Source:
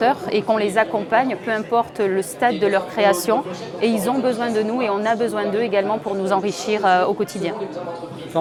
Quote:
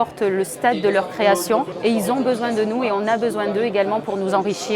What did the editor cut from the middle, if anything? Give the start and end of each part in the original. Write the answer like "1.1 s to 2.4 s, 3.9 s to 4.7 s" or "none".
3.5 s to 3.7 s